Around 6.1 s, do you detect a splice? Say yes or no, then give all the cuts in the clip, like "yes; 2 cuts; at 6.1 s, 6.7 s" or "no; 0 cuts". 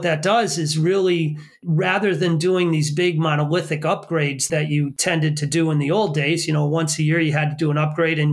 no; 2 cuts; at 1.6 s, 4.8 s